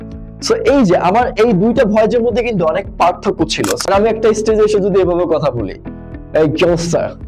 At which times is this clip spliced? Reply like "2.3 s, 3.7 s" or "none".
3.8 s

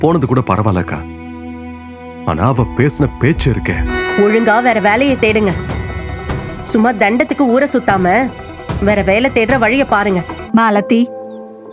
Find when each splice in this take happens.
3.9 s, 10.4 s

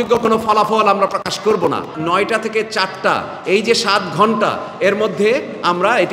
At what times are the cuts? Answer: 1.9 s

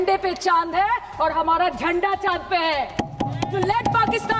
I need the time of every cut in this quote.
none

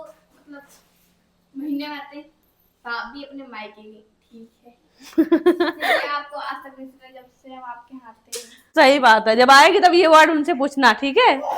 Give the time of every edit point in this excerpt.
none

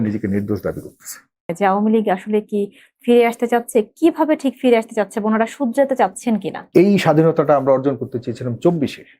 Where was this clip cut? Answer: 1.5 s, 6.6 s

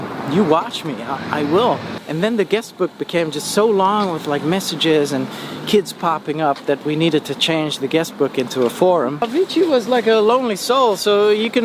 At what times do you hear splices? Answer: 1.9 s, 9.2 s

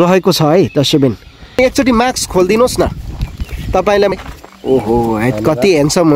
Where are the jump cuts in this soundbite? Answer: 1.6 s

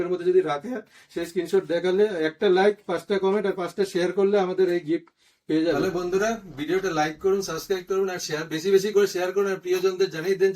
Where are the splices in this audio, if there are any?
5.8 s

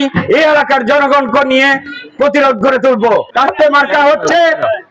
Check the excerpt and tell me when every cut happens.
3.3 s

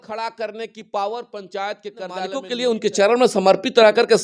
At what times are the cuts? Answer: 2.4 s

